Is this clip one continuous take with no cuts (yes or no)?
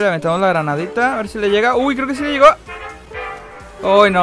yes